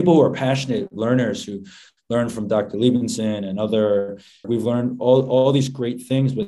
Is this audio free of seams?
no; 1 cut; at 4.4 s

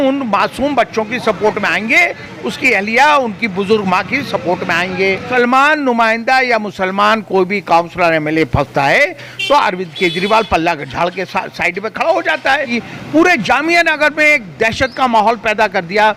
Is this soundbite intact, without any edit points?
no; 2 cuts; at 5.3 s, 12.7 s

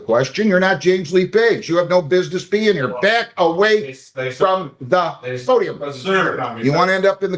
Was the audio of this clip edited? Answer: no; 0 cuts

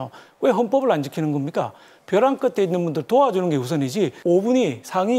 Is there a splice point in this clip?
yes; 2 cuts; at 1.9 s, 4.2 s

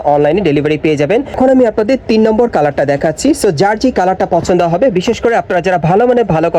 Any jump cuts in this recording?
yes; 1 cut; at 1.3 s

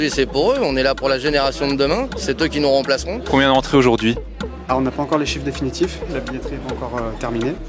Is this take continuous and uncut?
no; 1 cut; at 3.2 s

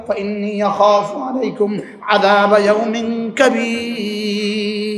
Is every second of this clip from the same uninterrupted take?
yes; 0 cuts

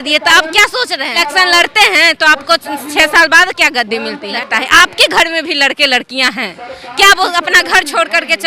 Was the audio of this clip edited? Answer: yes; 2 cuts; at 1.2 s, 4.3 s

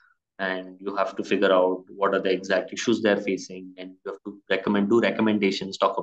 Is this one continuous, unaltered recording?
yes; 0 cuts

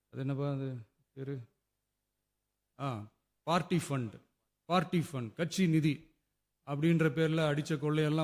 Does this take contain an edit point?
no; 0 cuts

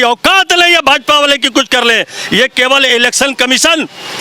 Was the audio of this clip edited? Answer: no; 0 cuts

